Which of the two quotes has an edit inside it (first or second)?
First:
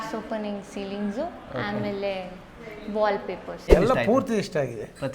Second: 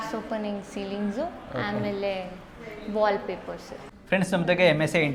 first